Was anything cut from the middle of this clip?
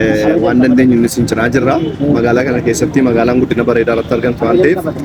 no; 0 cuts

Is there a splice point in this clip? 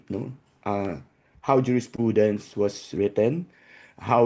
no; 0 cuts

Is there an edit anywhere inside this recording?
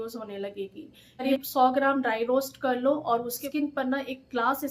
yes; 2 cuts; at 1.2 s, 3.4 s

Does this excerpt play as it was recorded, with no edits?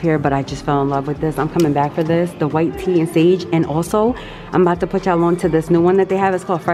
yes; 0 cuts

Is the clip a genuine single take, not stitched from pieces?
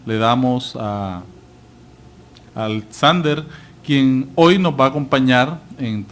no; 1 cut; at 4.1 s

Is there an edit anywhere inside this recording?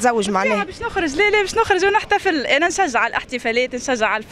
no; 0 cuts

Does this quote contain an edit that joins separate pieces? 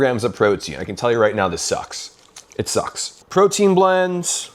no; 0 cuts

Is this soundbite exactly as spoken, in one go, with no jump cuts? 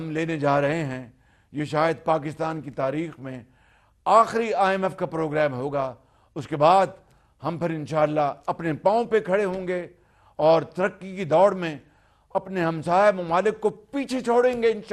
yes; 0 cuts

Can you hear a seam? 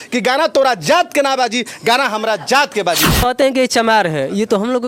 yes; 1 cut; at 3.2 s

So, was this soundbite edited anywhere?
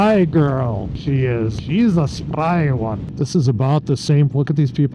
yes; 2 cuts; at 1.1 s, 3.1 s

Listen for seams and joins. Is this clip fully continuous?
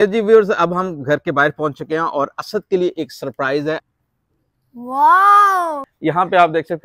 no; 2 cuts; at 3.9 s, 5.9 s

